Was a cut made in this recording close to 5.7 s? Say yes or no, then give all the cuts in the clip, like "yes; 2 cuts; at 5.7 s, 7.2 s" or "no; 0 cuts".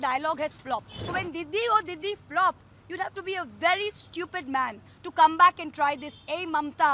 no; 1 cut; at 1.0 s